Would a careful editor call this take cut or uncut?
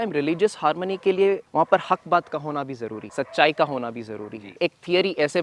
cut